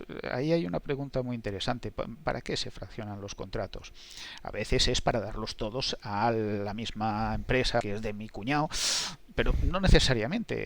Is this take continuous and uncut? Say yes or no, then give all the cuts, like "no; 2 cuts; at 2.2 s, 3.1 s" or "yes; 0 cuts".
no; 1 cut; at 7.8 s